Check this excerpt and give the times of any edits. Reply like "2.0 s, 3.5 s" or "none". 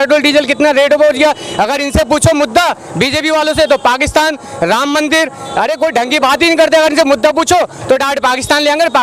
none